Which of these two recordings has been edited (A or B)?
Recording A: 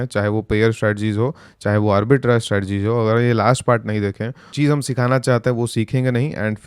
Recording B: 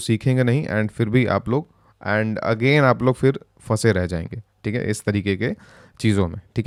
A